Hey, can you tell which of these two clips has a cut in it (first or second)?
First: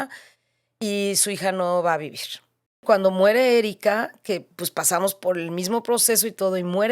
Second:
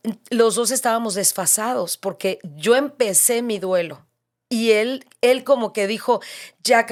first